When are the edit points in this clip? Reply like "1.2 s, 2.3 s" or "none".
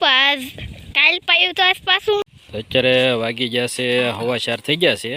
2.2 s